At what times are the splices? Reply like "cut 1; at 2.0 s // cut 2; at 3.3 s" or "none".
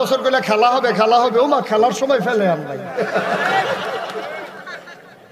none